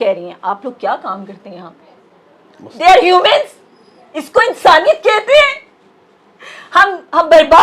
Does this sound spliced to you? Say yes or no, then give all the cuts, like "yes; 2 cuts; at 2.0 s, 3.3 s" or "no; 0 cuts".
no; 0 cuts